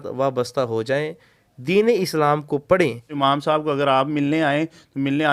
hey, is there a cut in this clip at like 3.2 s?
yes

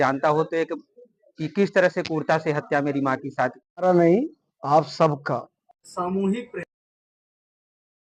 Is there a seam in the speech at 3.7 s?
yes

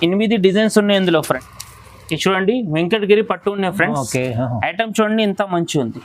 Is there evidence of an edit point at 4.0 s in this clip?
no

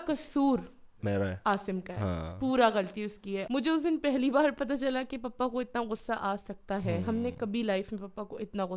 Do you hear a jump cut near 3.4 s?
yes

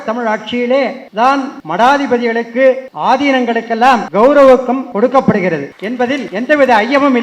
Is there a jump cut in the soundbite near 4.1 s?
yes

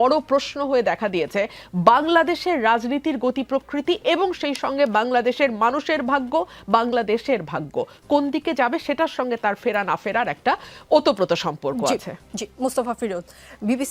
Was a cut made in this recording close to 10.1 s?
no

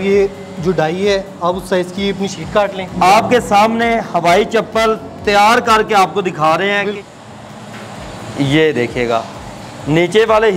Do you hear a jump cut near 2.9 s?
yes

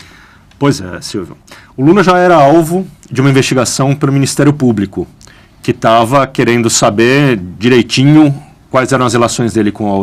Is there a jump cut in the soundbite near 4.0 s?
yes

